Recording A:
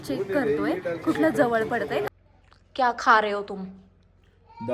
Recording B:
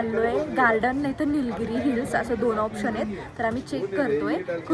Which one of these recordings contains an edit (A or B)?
A